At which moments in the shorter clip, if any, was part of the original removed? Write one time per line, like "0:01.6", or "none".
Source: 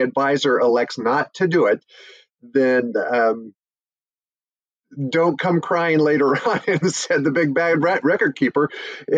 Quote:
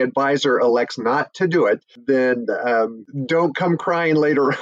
0:01.9
0:03.1

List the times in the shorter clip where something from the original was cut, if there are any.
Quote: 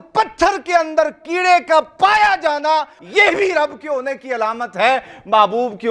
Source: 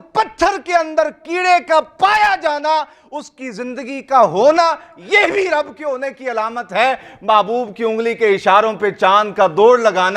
0:03.0

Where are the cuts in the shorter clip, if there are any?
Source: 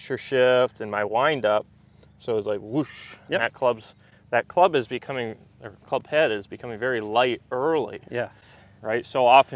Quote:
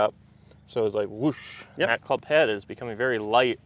0:02.0

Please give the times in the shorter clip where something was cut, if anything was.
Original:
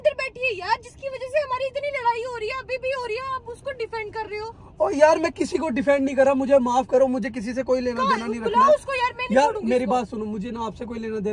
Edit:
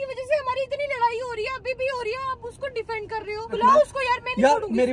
0:03.5

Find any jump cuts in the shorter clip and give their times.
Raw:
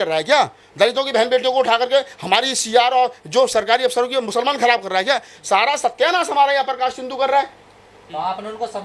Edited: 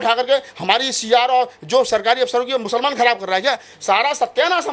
none

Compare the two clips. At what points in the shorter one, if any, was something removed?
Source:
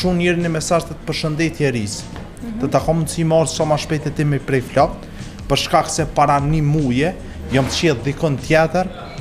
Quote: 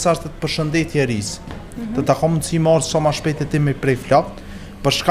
none

